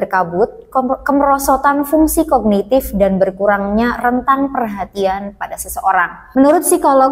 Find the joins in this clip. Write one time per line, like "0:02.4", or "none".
0:06.2